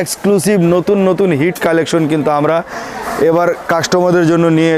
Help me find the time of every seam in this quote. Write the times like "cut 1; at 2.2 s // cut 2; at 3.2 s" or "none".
none